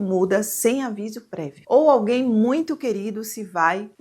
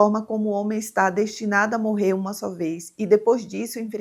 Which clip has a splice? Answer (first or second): first